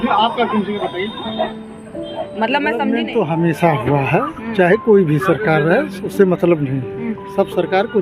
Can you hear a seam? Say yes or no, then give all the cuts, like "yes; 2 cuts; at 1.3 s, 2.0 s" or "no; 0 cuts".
yes; 1 cut; at 3.0 s